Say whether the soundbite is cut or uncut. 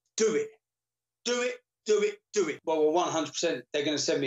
cut